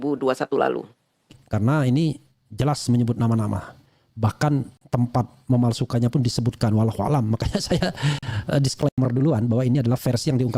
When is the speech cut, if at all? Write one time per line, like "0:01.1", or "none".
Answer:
0:01.4